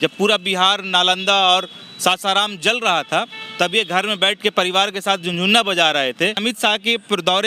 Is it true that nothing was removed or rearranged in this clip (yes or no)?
no